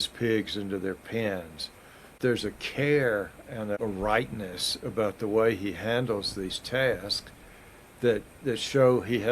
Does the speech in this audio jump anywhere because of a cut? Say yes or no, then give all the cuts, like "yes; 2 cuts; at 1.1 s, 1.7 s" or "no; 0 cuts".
yes; 2 cuts; at 2.2 s, 3.8 s